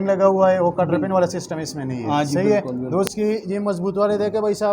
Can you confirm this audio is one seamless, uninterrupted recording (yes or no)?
no